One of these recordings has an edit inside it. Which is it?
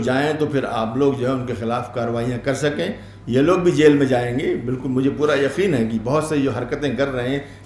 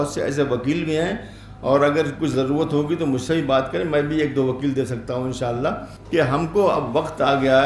second; 1 cut; at 5.9 s

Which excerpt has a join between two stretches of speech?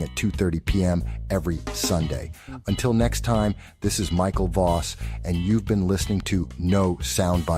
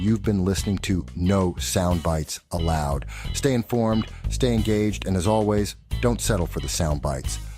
second; 1 cut; at 6.2 s

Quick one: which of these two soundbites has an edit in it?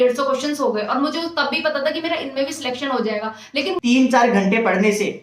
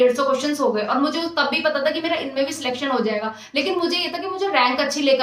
first; 1 cut; at 3.8 s

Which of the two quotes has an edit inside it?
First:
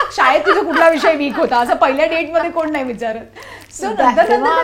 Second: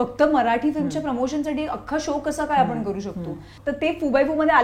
second; 1 cut; at 3.6 s

